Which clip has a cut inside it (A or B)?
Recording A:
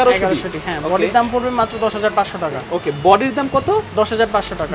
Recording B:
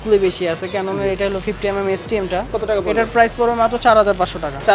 B